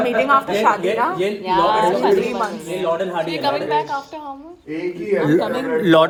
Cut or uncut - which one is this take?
uncut